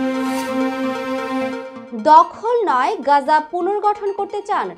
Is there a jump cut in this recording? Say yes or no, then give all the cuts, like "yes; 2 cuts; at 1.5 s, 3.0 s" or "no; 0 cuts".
no; 0 cuts